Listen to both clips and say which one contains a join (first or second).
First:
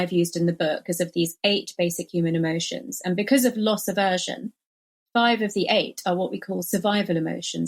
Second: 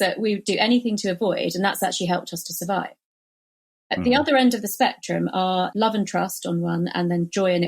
second